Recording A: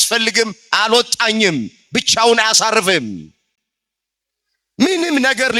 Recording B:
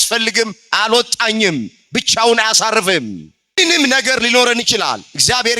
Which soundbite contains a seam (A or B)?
B